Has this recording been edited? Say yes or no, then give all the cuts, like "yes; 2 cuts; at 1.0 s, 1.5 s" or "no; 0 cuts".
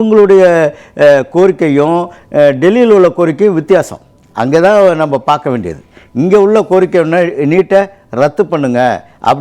no; 0 cuts